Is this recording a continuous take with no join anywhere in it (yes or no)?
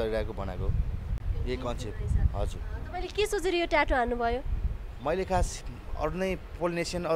yes